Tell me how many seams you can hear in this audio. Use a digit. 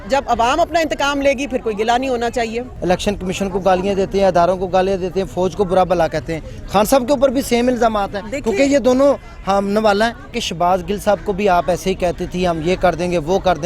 2